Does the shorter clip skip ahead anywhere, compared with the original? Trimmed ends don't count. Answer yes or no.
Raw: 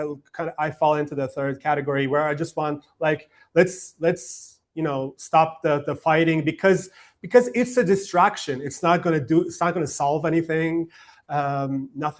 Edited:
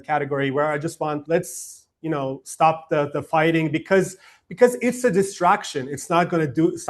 yes